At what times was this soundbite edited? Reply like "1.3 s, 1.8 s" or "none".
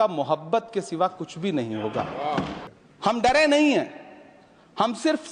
2.6 s